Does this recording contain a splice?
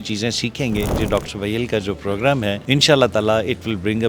yes; 2 cuts; at 1.0 s, 2.6 s

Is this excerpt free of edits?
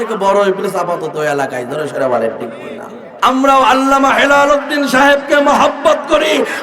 no; 1 cut; at 3.2 s

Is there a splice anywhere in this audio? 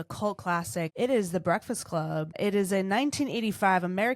yes; 2 cuts; at 0.9 s, 2.4 s

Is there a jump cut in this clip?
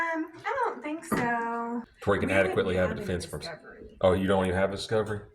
yes; 1 cut; at 1.9 s

